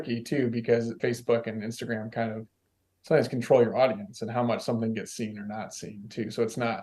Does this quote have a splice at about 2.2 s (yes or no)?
no